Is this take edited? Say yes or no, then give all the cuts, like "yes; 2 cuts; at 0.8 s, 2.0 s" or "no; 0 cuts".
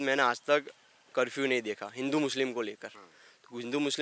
no; 0 cuts